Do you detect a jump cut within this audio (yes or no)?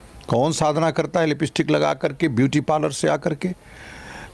no